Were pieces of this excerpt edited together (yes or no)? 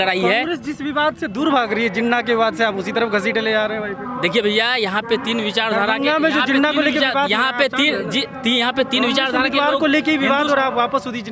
no